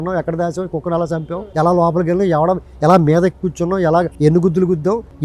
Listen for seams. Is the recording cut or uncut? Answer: uncut